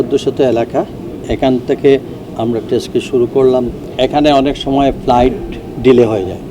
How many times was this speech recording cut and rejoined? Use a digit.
1